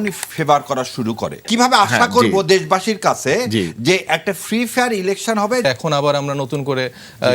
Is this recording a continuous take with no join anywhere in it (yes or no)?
no